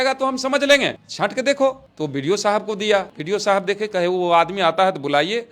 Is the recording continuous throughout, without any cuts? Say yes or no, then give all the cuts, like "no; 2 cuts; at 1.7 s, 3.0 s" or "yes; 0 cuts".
no; 1 cut; at 3.1 s